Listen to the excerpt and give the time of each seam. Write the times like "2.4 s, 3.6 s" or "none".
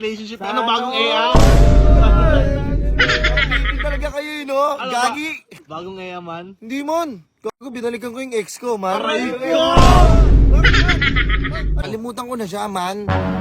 5.6 s, 11.8 s